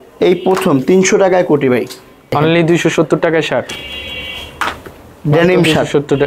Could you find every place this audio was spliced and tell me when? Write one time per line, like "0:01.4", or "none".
0:02.3
0:03.7